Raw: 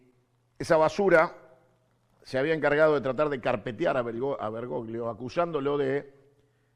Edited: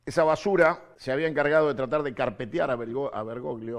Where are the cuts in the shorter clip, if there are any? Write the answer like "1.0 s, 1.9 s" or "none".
0.9 s